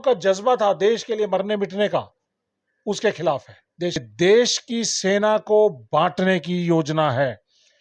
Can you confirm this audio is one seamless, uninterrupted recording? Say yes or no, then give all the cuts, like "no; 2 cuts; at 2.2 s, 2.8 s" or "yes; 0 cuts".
no; 1 cut; at 4.0 s